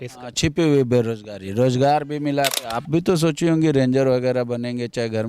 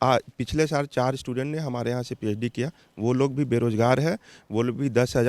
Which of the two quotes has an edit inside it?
first; 1 cut; at 2.6 s

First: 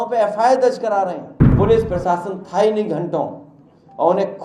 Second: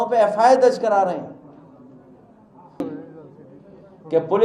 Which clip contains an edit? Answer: first; 1 cut; at 1.5 s

